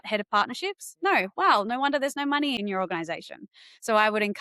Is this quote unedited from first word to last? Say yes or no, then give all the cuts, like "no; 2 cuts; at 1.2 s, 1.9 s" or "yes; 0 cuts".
no; 1 cut; at 2.6 s